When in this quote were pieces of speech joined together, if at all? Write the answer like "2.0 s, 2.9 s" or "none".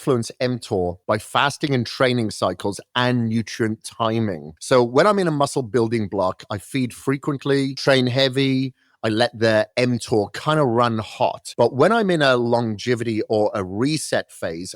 4.5 s, 7.8 s, 11.4 s